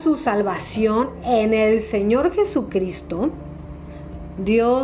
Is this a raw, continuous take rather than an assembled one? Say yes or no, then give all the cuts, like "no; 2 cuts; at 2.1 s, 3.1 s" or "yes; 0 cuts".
yes; 0 cuts